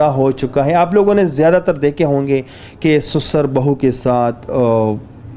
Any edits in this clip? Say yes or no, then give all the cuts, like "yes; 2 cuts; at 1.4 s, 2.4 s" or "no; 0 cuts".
no; 0 cuts